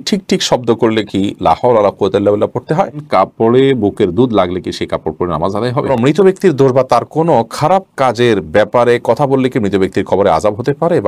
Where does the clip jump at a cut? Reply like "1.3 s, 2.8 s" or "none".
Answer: 3.0 s, 5.9 s